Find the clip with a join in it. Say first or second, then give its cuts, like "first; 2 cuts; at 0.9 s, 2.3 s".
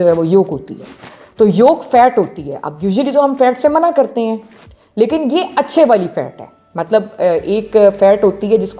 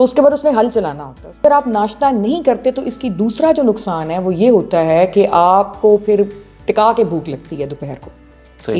second; 1 cut; at 1.4 s